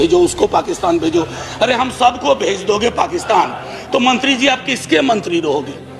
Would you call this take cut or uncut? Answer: uncut